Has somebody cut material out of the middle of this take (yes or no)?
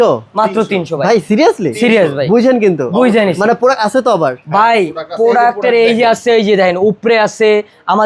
no